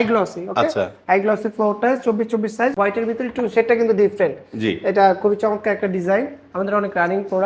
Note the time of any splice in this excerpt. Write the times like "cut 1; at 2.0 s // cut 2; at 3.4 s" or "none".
cut 1; at 2.7 s